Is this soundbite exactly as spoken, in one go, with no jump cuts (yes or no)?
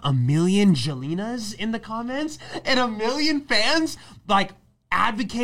yes